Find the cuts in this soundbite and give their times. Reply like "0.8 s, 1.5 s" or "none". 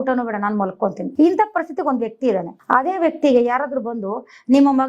1.1 s, 2.5 s